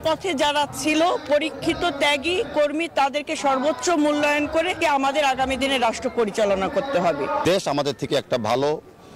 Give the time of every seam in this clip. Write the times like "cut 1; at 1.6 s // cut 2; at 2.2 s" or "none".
cut 1; at 4.8 s // cut 2; at 7.4 s